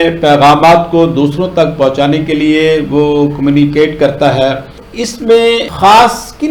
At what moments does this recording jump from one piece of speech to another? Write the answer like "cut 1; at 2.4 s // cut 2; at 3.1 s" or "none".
cut 1; at 4.8 s